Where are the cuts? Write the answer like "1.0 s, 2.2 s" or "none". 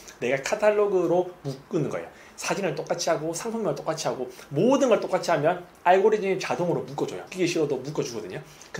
7.2 s